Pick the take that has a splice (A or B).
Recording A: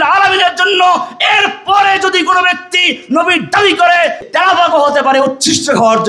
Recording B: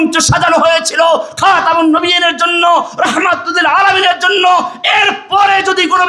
A